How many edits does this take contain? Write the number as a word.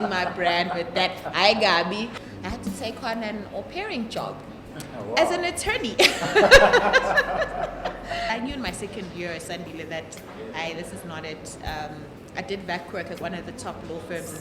two